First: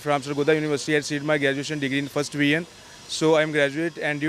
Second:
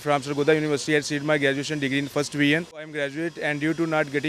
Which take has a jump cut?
second; 1 cut; at 3.0 s

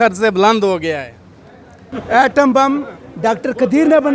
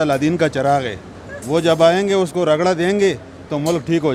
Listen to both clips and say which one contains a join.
first; 1 cut; at 1.9 s

